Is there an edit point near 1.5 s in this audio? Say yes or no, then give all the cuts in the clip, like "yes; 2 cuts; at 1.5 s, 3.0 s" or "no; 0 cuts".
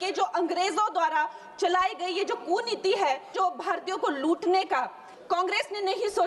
no; 2 cuts; at 3.3 s, 5.1 s